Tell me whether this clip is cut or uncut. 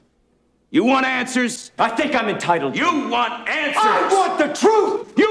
uncut